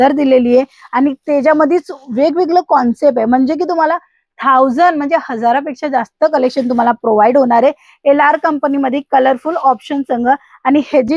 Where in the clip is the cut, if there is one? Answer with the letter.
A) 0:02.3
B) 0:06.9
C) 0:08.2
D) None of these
D